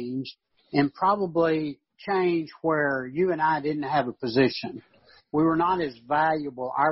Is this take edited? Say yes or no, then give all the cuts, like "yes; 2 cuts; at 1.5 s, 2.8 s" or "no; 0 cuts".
no; 0 cuts